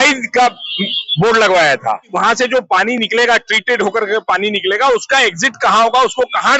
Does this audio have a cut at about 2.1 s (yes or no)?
yes